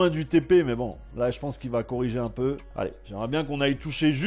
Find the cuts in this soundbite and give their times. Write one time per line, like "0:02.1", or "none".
none